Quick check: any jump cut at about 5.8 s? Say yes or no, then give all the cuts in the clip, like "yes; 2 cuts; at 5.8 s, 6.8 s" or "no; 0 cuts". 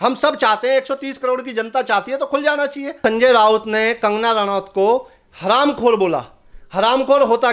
no; 1 cut; at 3.0 s